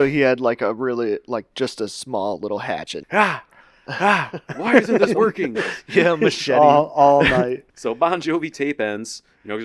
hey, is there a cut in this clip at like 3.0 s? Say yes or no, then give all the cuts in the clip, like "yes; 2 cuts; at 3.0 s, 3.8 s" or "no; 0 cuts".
yes; 2 cuts; at 3.0 s, 7.7 s